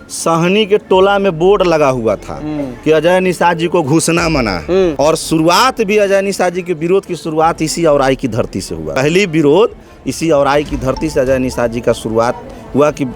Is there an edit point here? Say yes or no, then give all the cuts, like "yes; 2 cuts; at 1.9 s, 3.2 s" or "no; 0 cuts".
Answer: yes; 2 cuts; at 4.9 s, 9.0 s